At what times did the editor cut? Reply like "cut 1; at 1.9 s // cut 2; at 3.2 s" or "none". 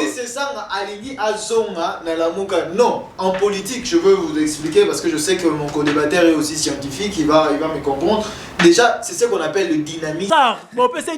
cut 1; at 10.3 s